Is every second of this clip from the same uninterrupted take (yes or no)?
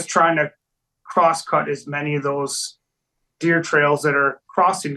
yes